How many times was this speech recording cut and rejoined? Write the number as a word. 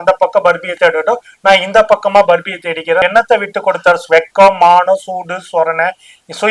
one